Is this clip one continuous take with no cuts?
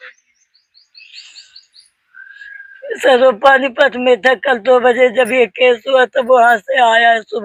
yes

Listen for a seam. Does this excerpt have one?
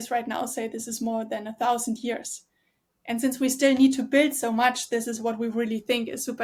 no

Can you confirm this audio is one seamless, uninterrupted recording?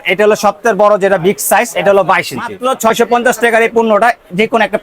no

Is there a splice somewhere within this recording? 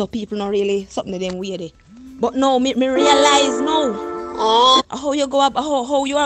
no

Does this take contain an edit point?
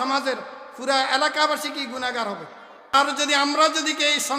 yes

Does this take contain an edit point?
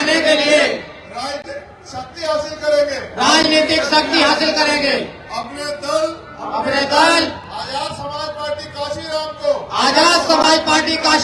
no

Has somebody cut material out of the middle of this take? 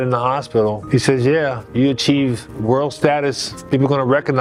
no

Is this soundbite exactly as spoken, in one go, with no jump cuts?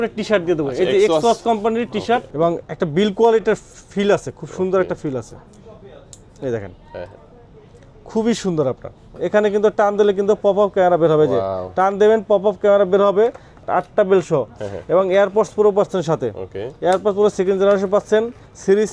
no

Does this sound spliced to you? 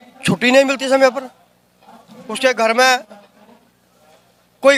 no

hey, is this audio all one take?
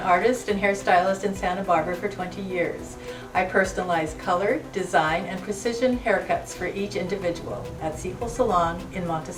yes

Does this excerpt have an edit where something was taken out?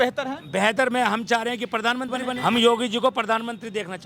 yes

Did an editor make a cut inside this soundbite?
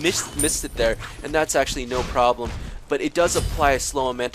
no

